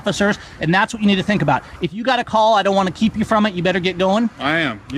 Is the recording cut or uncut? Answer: uncut